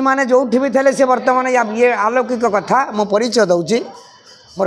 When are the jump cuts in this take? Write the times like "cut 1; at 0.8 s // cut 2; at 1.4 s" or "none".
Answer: none